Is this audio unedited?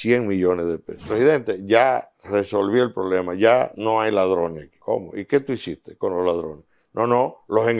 no; 2 cuts; at 1.1 s, 4.7 s

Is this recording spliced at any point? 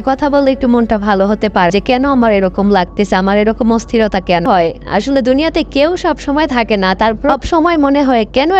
yes; 2 cuts; at 1.7 s, 4.4 s

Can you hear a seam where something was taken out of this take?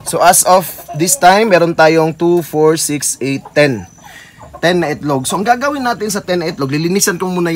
no; 0 cuts

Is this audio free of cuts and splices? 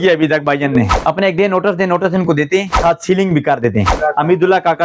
no; 3 cuts; at 0.9 s, 2.7 s, 3.9 s

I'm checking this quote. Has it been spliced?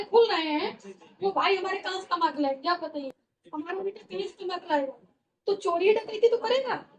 no; 0 cuts

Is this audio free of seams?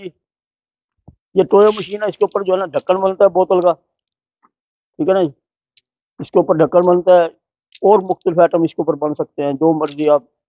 yes; 0 cuts

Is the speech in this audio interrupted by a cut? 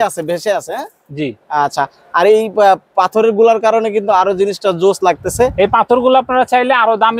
no; 0 cuts

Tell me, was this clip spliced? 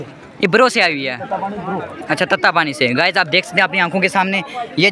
no; 0 cuts

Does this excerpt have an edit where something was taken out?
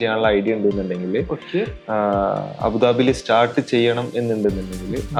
no; 0 cuts

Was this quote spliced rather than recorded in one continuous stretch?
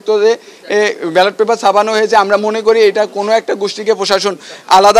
no; 0 cuts

